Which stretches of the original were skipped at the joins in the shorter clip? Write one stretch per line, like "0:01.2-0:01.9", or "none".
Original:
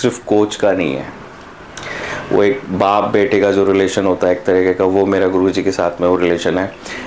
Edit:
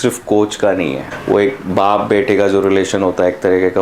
0:01.1-0:02.1